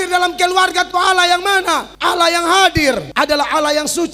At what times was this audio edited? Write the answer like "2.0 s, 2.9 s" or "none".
1.9 s, 3.1 s